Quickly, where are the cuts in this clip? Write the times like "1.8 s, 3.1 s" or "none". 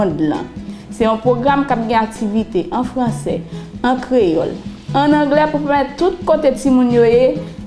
none